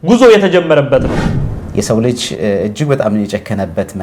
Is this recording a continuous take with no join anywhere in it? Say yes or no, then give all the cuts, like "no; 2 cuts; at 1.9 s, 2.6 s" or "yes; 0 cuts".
no; 1 cut; at 1.2 s